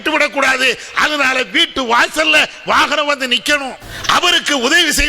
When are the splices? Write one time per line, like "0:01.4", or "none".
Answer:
0:03.9

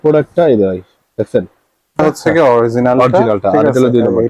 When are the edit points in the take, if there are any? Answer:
0:02.0

